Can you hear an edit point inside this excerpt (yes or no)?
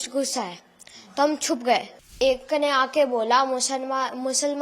yes